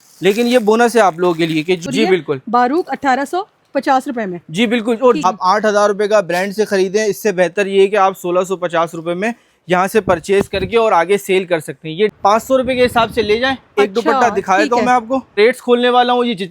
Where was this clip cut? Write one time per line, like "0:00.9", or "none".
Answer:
0:01.8
0:05.2
0:12.1
0:15.4